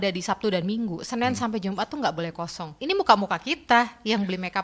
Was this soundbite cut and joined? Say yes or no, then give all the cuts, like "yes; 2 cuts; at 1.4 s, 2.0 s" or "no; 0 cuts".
yes; 1 cut; at 2.7 s